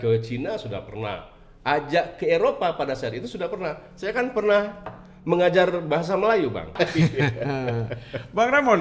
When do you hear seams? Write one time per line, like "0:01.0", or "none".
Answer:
0:06.7